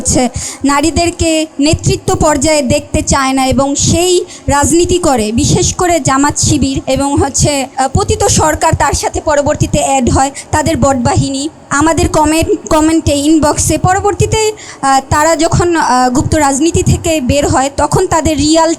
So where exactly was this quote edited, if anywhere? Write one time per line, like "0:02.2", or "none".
0:01.5
0:06.8
0:07.7
0:11.6